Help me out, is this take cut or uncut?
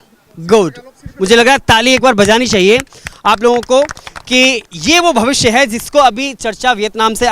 cut